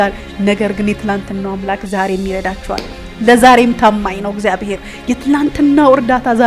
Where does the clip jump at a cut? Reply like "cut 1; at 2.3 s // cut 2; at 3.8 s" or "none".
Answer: none

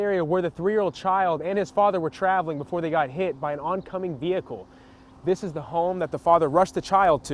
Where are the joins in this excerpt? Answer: none

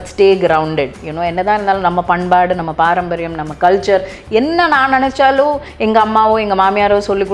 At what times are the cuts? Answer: none

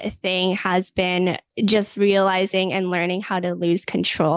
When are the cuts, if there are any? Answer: cut 1; at 1.5 s

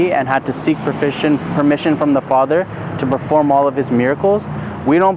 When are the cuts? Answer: none

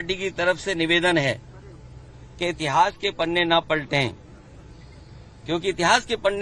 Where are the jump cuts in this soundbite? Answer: none

